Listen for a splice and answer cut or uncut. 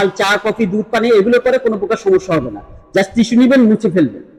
uncut